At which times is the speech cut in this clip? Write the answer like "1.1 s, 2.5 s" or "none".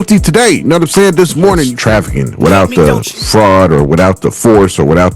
1.7 s